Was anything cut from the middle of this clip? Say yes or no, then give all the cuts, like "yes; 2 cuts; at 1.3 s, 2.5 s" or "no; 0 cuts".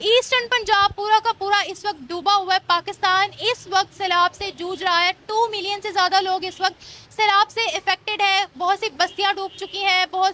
no; 0 cuts